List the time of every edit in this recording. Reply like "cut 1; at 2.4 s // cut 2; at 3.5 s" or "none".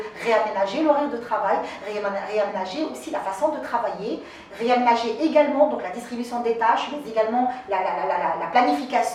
none